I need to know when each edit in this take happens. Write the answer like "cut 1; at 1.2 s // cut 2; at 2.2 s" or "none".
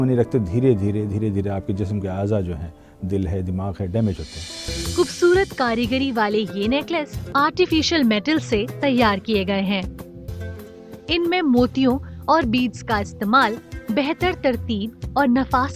cut 1; at 4.7 s // cut 2; at 7.3 s // cut 3; at 10.2 s